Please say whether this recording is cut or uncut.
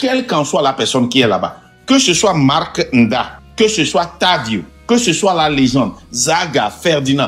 cut